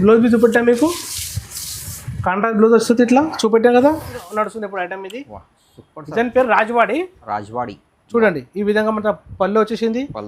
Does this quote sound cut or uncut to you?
cut